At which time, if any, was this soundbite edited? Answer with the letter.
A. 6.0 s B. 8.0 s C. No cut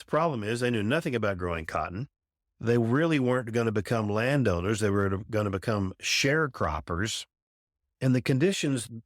B